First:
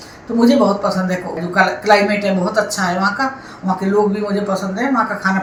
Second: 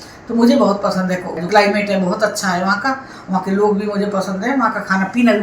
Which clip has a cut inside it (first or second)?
second